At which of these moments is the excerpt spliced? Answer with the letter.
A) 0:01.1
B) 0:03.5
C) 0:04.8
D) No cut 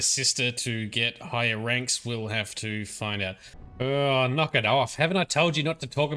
B